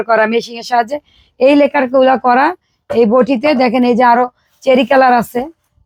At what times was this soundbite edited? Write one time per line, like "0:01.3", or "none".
none

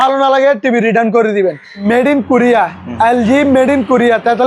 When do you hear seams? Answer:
0:01.8

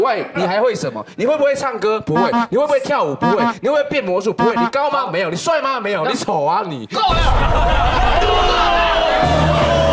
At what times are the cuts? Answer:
none

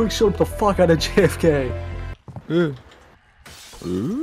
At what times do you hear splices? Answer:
0:02.2

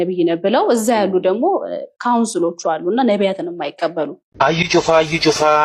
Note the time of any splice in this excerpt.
0:04.2

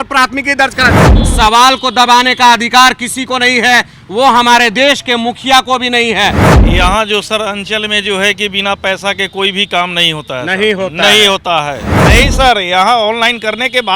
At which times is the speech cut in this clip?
0:01.0
0:06.5
0:11.9

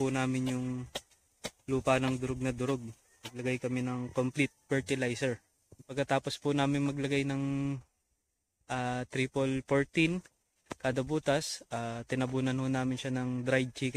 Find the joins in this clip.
0:03.3
0:05.9

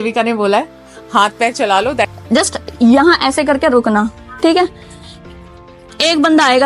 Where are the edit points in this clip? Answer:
0:02.1

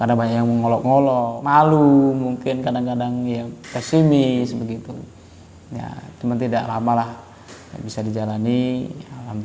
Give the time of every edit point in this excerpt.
0:01.3

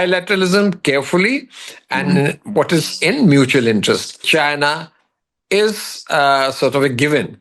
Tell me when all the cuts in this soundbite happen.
0:04.2

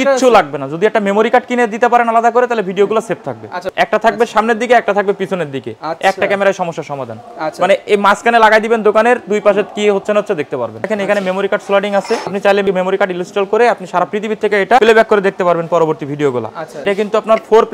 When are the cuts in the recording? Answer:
0:03.7
0:10.9
0:12.5
0:14.8
0:16.8

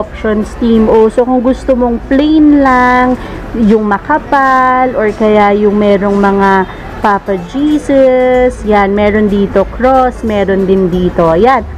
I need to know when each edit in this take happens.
none

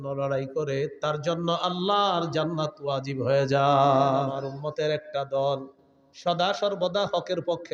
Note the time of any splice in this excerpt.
0:04.4

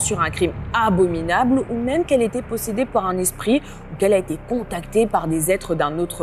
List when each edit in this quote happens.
none

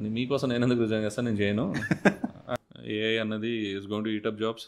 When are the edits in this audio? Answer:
0:02.5

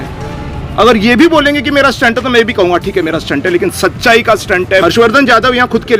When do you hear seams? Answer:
0:04.8

